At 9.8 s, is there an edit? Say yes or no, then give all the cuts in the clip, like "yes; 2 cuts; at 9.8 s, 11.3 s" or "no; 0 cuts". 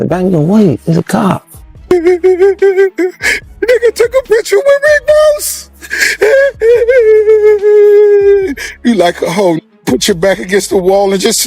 no; 1 cut; at 1.9 s